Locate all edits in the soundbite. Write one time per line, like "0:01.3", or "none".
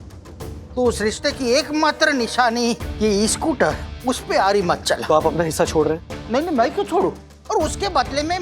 0:05.0
0:07.3

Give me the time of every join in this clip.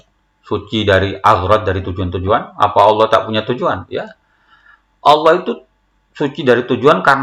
none

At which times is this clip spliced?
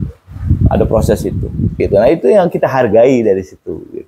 0:01.7

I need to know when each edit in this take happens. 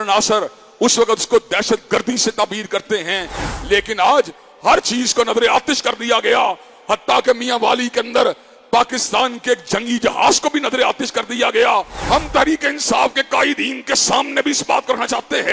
0:11.9

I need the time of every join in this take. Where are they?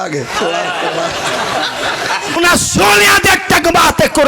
0:02.4

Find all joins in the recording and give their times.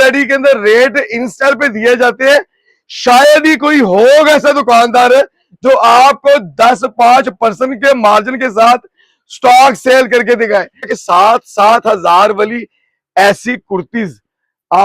0:11.0

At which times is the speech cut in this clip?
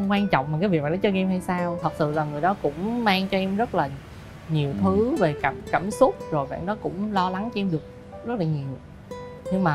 0:01.8

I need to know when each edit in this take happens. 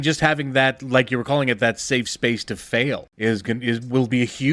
0:03.1

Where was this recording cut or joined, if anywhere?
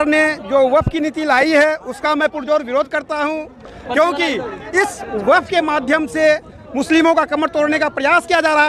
none

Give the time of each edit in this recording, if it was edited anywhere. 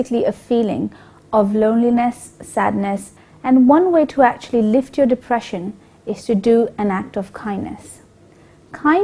0:07.3

